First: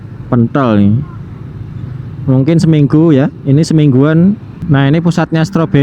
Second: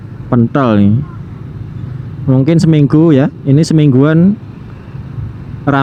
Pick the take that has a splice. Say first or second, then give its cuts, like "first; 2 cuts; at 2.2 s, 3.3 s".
first; 1 cut; at 4.6 s